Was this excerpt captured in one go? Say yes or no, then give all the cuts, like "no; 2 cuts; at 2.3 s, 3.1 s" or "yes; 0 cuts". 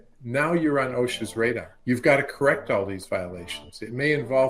no; 1 cut; at 1.7 s